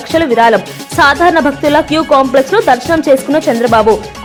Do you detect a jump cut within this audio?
no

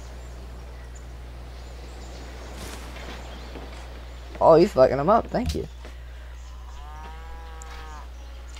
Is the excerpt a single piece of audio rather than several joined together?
no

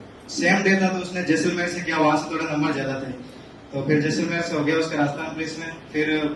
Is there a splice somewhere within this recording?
no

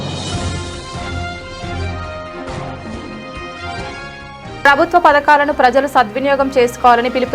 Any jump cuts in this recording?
no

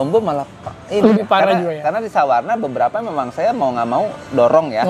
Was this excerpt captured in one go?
yes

